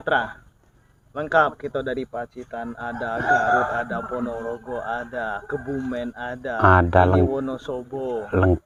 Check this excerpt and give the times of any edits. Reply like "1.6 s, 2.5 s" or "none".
none